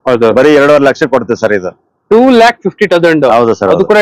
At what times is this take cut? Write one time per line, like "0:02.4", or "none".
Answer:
none